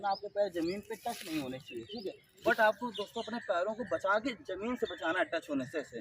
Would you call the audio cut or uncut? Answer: cut